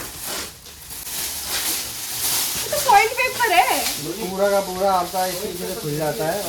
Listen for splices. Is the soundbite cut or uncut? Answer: uncut